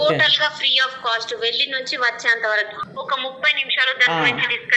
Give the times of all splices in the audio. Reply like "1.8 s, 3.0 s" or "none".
2.9 s